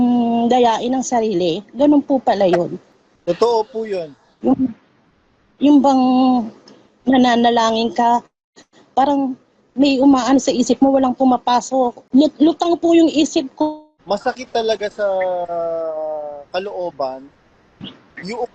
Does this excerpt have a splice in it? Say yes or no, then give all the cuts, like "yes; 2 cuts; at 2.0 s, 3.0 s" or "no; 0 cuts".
yes; 2 cuts; at 12.0 s, 13.9 s